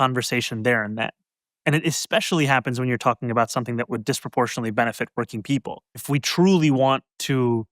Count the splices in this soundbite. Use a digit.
1